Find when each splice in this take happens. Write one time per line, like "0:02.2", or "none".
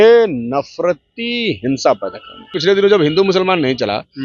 0:02.5